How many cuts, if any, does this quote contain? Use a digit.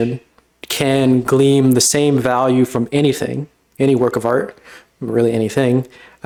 0